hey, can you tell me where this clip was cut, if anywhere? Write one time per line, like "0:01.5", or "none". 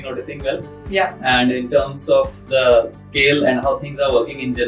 none